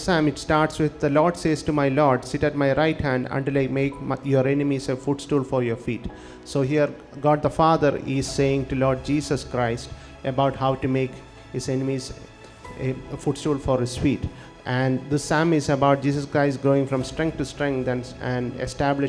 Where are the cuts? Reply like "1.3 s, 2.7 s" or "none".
none